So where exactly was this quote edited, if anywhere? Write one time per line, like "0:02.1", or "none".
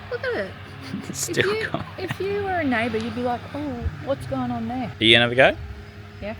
0:04.9